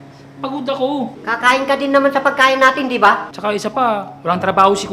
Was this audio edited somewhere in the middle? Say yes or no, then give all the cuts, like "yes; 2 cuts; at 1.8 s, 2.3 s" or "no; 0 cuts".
yes; 2 cuts; at 1.2 s, 3.3 s